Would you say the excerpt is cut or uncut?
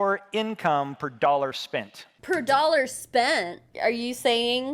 cut